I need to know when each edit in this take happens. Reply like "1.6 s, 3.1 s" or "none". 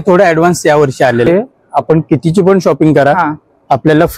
1.3 s